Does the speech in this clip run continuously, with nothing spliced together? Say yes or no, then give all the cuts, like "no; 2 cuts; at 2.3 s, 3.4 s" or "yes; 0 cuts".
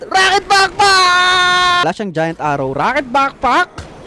no; 1 cut; at 1.8 s